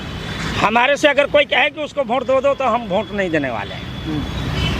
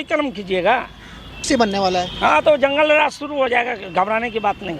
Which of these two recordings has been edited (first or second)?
second